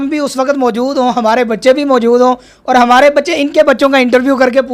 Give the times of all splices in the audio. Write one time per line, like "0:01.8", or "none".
none